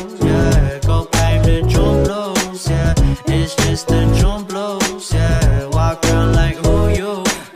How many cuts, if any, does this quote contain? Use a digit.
1